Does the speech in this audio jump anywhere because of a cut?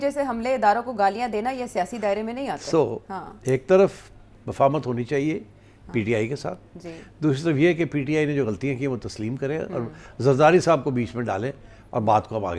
no; 0 cuts

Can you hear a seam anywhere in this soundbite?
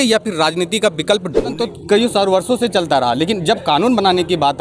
yes; 1 cut; at 1.5 s

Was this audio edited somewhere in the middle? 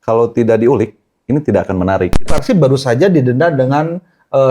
yes; 1 cut; at 2.3 s

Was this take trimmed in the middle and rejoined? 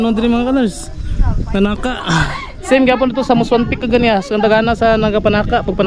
no; 0 cuts

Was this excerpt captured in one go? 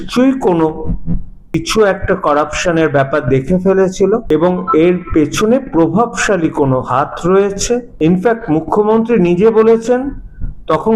no; 3 cuts; at 1.5 s, 4.2 s, 7.9 s

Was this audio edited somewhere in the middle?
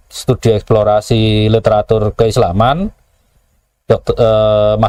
no; 0 cuts

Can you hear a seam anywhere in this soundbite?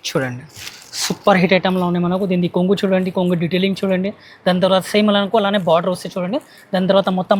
no; 0 cuts

